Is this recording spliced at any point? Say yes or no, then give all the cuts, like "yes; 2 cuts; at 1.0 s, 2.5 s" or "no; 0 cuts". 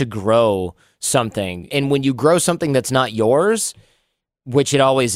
yes; 1 cut; at 1.7 s